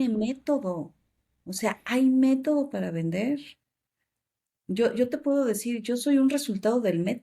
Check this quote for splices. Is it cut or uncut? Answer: uncut